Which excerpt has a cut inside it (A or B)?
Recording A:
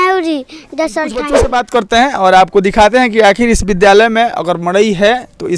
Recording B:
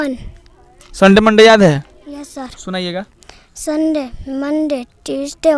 A